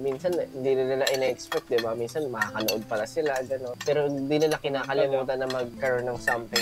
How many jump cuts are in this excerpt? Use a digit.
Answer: 2